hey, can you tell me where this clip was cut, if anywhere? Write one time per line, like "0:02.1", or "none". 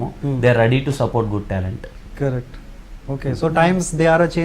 none